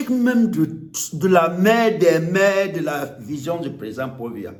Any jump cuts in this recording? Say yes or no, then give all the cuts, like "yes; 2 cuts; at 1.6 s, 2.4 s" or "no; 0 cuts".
no; 0 cuts